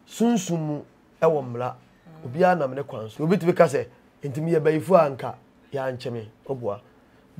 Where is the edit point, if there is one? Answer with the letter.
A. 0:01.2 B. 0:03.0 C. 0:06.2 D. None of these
B